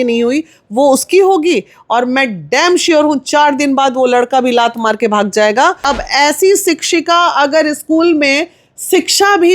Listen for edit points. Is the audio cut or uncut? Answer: cut